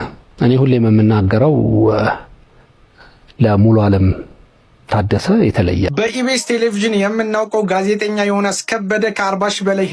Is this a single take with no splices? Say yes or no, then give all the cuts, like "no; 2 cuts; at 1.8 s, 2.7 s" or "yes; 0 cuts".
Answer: no; 1 cut; at 5.9 s